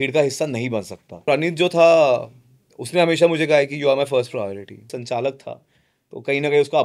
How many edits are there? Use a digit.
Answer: 2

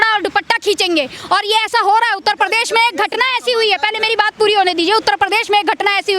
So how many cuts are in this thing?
0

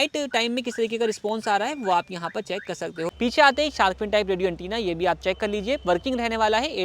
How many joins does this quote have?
1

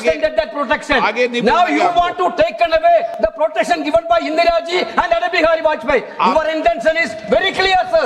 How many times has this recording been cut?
1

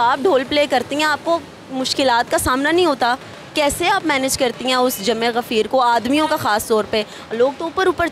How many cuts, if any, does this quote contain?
0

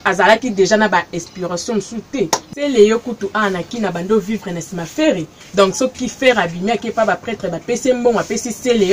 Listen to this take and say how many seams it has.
1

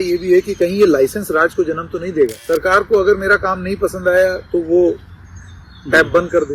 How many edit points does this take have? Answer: 1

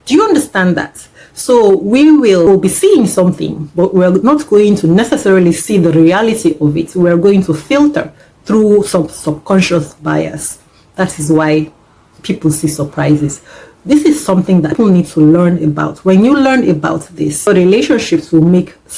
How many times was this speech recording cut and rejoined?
3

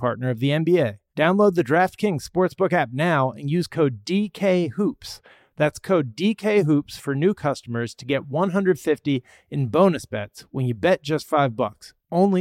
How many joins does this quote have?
1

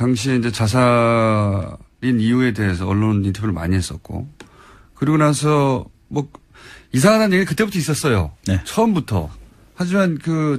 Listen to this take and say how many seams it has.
1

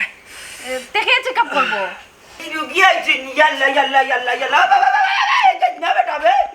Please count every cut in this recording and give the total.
1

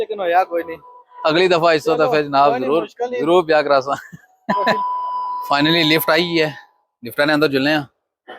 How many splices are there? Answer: 1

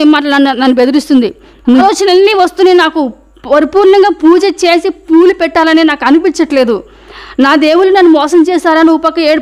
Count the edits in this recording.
1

